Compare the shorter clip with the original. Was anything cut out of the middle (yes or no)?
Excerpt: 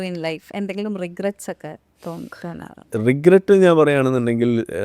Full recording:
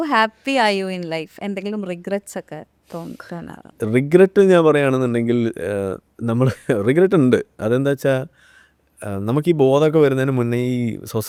no